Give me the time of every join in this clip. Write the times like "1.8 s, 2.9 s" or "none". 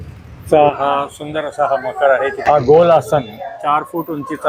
2.4 s